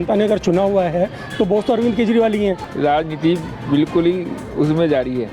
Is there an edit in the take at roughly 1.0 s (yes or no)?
no